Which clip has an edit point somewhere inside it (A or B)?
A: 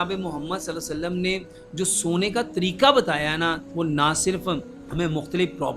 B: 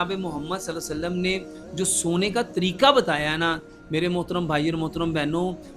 A